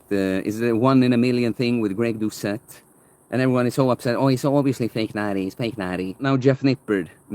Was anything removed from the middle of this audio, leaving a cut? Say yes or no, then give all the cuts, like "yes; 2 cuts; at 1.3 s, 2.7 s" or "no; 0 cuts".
yes; 1 cut; at 6.2 s